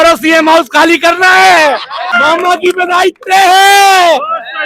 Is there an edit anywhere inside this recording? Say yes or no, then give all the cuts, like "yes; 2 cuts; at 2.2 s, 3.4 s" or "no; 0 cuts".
yes; 1 cut; at 2.0 s